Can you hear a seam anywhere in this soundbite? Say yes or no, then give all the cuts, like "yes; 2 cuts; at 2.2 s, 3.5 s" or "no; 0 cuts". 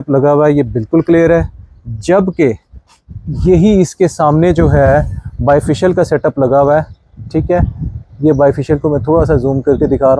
no; 0 cuts